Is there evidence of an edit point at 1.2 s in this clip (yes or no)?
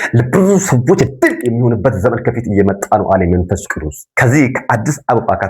no